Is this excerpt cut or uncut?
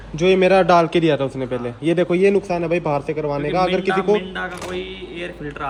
uncut